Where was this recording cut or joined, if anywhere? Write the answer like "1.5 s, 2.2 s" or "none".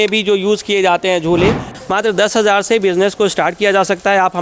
1.7 s